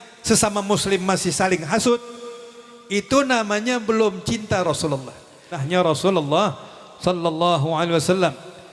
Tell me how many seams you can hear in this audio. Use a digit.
1